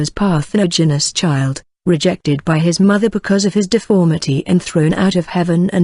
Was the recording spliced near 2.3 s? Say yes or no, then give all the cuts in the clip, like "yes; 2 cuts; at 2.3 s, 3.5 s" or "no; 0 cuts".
yes; 1 cut; at 2.3 s